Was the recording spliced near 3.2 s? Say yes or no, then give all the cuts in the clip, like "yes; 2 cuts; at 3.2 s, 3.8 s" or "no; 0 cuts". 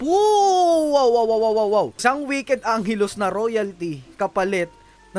no; 1 cut; at 1.9 s